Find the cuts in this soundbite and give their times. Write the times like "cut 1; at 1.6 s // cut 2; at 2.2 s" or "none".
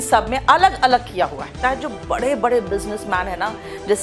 cut 1; at 1.6 s